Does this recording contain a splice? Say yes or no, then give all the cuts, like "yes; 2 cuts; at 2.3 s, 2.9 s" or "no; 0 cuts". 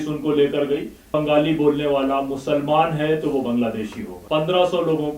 yes; 2 cuts; at 1.1 s, 4.1 s